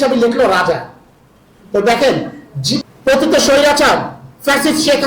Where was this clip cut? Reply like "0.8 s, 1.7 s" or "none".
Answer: 2.8 s

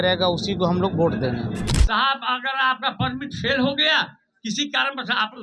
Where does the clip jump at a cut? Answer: 1.7 s

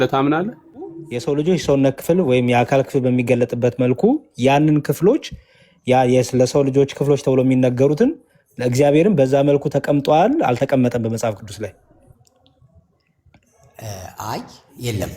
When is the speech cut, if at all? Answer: 1.1 s

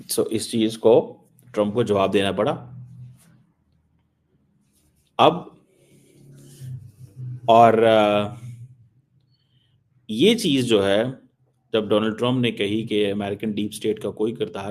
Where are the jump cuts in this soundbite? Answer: none

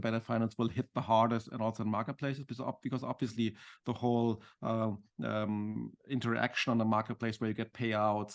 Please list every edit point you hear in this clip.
none

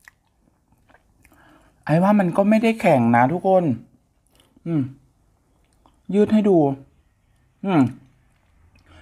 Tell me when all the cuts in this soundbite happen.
none

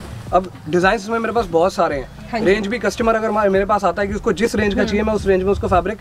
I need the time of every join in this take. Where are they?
none

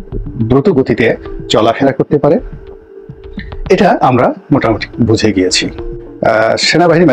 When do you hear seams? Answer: 6.0 s

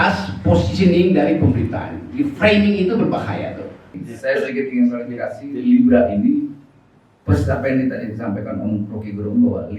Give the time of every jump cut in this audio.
4.0 s

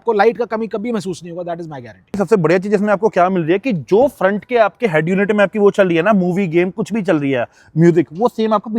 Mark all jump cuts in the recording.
2.1 s

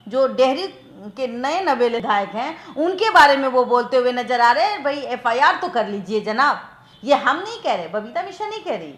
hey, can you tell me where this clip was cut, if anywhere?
none

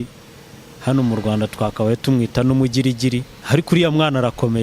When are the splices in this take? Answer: 3.3 s

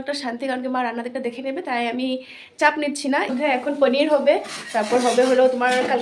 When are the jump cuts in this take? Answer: 3.3 s

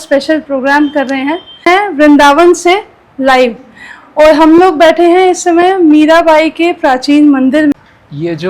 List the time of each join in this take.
1.7 s, 7.8 s

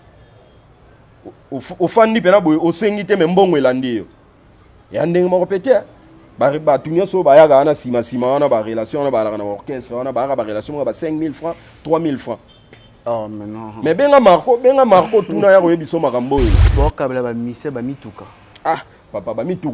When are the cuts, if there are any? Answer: 16.7 s

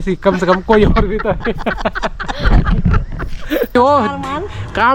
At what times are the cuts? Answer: 3.7 s

